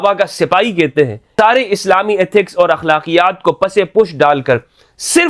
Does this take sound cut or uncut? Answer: cut